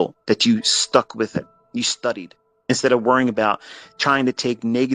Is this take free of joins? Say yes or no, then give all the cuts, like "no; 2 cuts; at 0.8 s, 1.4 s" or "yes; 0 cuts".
no; 2 cuts; at 1.6 s, 2.7 s